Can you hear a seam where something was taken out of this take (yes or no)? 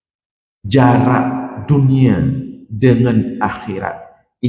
no